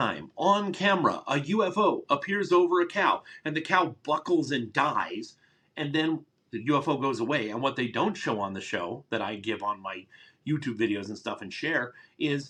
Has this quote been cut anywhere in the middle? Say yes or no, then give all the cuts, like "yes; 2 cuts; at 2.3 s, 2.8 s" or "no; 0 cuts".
no; 0 cuts